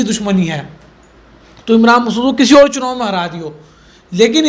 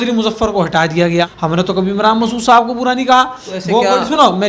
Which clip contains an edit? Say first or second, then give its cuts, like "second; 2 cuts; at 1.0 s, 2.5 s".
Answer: second; 1 cut; at 1.3 s